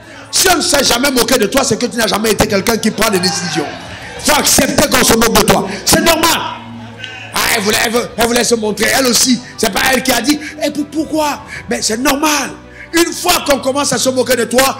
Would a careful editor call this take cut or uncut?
uncut